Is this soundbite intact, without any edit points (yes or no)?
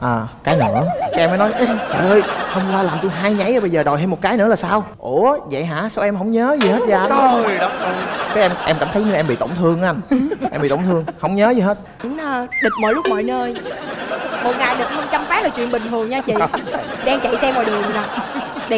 no